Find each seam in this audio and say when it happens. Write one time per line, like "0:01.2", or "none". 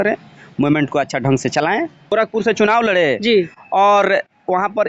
0:02.1